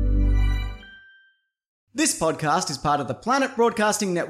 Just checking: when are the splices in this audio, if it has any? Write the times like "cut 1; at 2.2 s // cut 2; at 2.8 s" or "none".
cut 1; at 1.8 s